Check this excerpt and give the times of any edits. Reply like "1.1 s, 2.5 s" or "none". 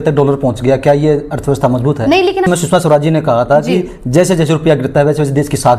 2.5 s